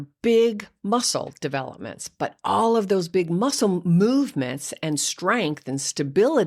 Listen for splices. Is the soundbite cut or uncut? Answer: uncut